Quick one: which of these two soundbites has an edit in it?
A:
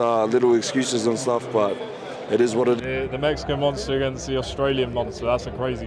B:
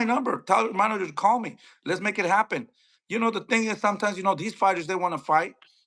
A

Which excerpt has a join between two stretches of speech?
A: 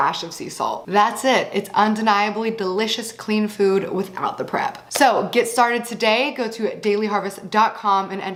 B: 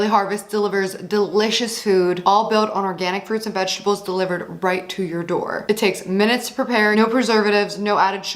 B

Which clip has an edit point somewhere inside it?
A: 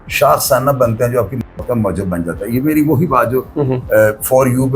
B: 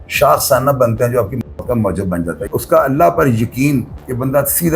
B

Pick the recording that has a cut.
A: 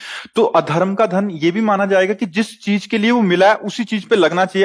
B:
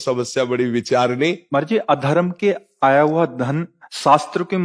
B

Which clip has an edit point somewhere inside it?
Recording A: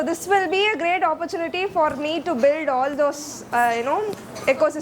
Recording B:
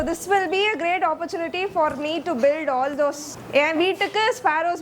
B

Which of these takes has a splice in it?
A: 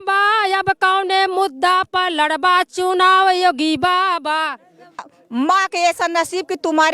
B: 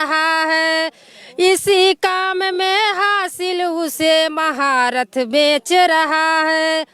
A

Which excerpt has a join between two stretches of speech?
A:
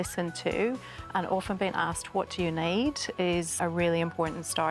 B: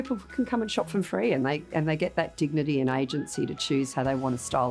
A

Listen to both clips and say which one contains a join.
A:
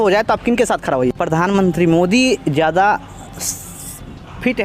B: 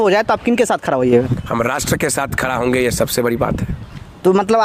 A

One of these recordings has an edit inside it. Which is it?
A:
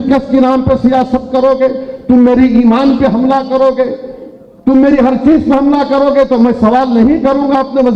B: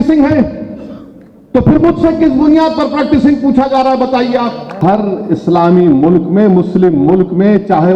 B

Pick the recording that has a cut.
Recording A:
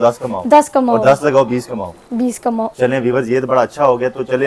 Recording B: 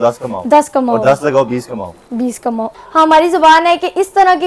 B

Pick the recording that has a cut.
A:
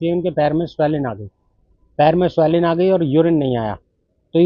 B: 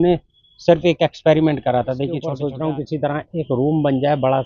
B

